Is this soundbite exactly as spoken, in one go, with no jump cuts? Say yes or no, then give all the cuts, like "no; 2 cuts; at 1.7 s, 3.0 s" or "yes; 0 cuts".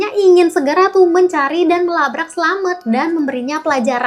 yes; 0 cuts